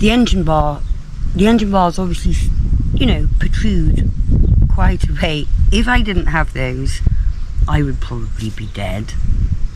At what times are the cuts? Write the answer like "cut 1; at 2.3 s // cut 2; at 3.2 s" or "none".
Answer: none